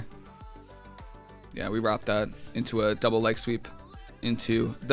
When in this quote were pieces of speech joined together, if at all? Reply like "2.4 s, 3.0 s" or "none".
none

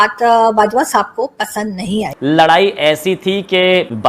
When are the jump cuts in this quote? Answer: 2.1 s

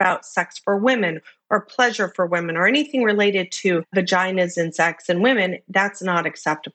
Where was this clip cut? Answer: 3.9 s

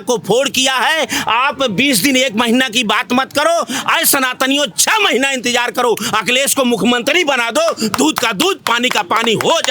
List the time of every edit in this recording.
none

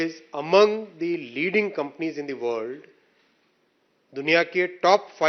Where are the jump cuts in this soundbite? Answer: none

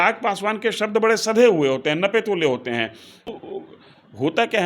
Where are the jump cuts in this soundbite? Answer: 3.3 s

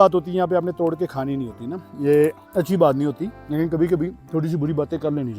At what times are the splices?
2.4 s, 3.3 s, 4.2 s

